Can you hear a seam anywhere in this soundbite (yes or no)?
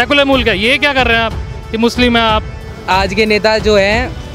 yes